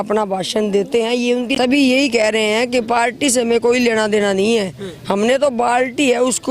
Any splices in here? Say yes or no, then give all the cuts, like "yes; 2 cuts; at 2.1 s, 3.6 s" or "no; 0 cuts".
yes; 1 cut; at 1.5 s